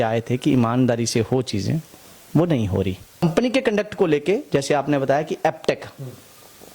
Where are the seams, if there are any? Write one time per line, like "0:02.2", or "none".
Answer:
0:03.2

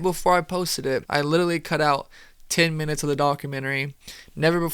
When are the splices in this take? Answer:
0:01.1

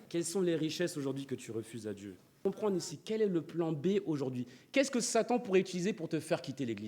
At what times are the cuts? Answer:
0:02.4

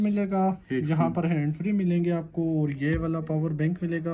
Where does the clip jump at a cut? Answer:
none

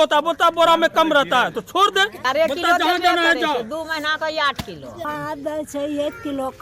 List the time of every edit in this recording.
0:02.2
0:05.1

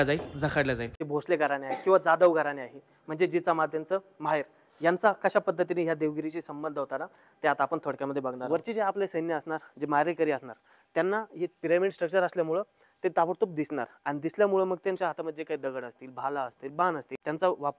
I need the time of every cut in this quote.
0:01.0
0:08.4

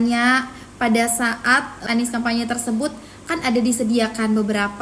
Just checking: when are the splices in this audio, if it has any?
0:01.8

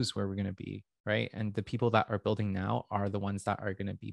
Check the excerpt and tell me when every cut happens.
none

